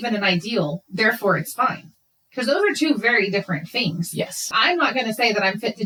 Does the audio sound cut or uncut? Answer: uncut